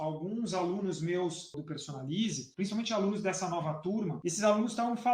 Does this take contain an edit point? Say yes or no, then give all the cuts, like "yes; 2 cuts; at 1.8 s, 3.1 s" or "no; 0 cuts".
yes; 3 cuts; at 1.6 s, 2.4 s, 4.2 s